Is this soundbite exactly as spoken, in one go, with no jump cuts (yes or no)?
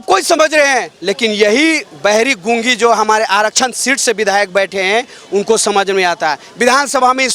yes